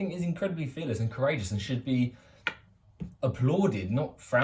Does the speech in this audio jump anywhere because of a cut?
no; 0 cuts

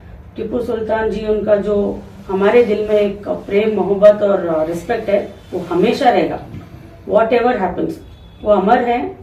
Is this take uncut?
yes; 0 cuts

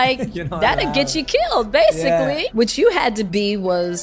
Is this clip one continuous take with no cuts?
no; 2 cuts; at 2.5 s, 3.3 s

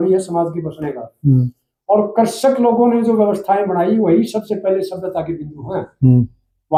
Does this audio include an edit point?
no; 0 cuts

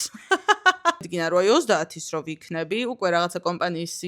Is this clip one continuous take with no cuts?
no; 1 cut; at 1.0 s

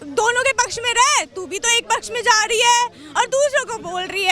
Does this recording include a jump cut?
no; 0 cuts

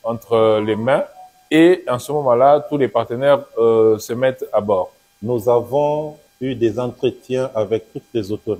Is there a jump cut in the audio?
yes; 2 cuts; at 5.0 s, 6.2 s

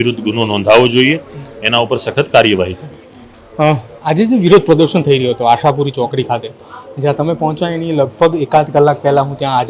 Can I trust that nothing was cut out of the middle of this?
yes; 0 cuts

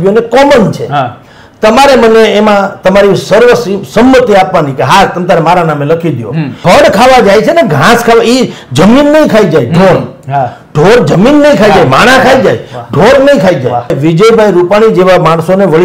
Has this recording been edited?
yes; 2 cuts; at 6.6 s, 14.0 s

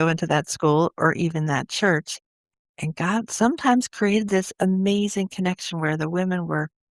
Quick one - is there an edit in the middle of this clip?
yes; 1 cut; at 2.5 s

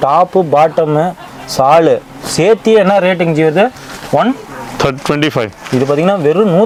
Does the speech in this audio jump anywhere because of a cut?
no; 0 cuts

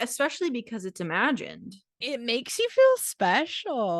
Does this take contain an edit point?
yes; 1 cut; at 1.9 s

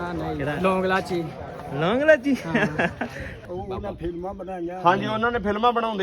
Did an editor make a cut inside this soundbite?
yes; 1 cut; at 3.4 s

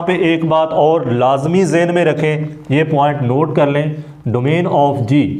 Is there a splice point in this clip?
no; 0 cuts

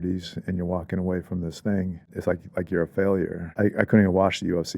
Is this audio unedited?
no; 2 cuts; at 2.1 s, 3.4 s

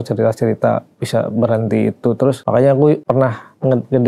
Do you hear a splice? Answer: yes; 2 cuts; at 2.4 s, 3.0 s

